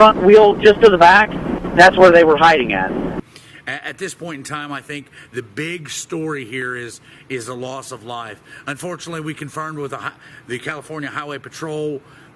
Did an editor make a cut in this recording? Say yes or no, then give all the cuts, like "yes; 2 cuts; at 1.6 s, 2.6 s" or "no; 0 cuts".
yes; 1 cut; at 3.1 s